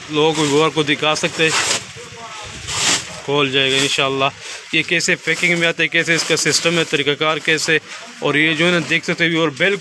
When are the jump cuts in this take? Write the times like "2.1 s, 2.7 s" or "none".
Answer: none